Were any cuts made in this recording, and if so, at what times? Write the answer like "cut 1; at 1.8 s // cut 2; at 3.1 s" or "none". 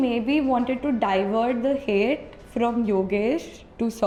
none